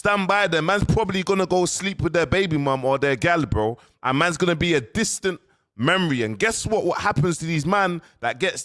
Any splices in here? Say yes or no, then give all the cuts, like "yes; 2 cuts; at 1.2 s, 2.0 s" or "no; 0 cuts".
yes; 1 cut; at 3.2 s